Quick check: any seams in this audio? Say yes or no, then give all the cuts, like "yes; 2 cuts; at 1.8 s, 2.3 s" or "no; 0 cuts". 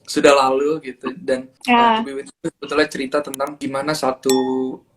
yes; 2 cuts; at 1.5 s, 3.6 s